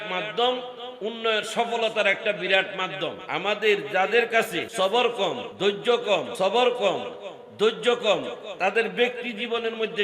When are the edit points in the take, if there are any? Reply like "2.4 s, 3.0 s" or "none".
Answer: 3.2 s, 4.6 s, 5.5 s, 6.3 s